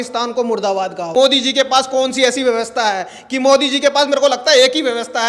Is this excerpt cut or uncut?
cut